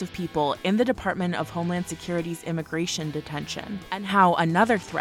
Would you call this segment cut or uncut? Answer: cut